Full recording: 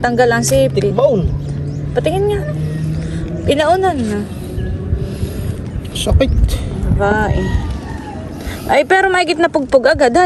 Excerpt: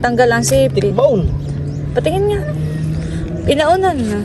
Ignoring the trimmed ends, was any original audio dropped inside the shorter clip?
no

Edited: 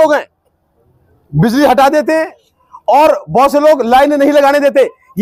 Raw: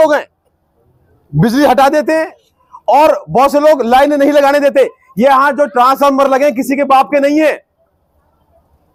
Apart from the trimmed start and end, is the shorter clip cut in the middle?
no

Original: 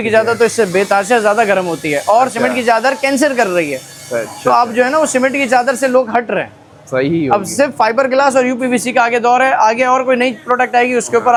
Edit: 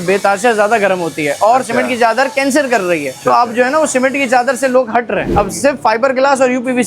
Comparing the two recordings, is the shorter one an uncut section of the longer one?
no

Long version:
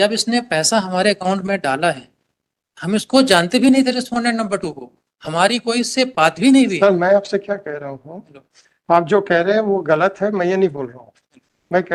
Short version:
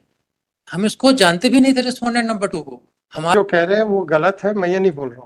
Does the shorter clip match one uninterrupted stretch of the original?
no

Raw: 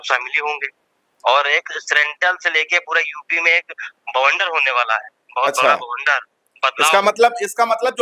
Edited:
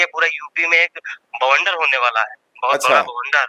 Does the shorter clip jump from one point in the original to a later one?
no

